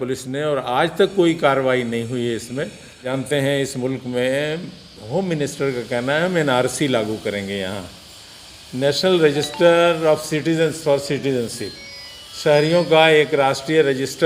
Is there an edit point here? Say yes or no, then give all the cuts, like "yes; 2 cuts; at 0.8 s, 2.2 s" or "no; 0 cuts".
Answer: yes; 1 cut; at 3.0 s